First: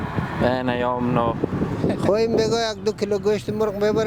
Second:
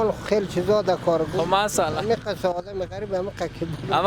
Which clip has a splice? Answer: first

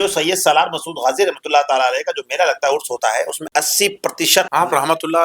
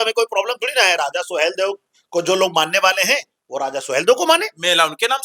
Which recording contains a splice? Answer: first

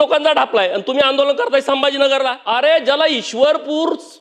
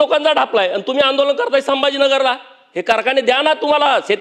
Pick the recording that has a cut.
first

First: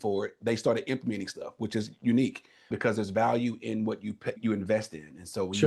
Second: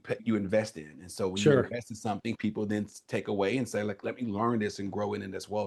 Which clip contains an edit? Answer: first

